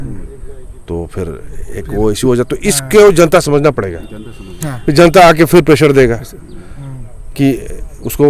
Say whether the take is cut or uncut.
uncut